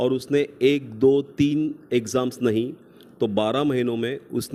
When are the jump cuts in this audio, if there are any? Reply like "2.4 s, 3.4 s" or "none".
none